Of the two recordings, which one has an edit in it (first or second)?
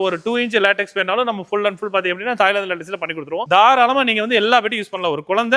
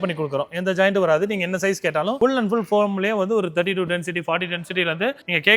first